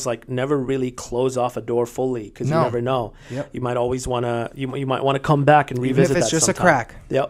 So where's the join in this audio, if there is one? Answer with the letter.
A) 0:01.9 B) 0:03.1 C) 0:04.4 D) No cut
D